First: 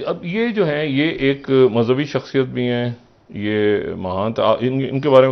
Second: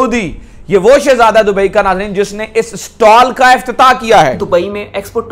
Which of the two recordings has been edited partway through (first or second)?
second